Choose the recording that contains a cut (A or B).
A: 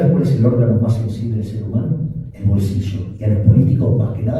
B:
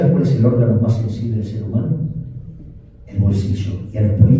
A